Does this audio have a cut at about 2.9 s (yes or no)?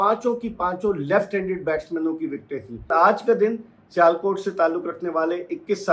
yes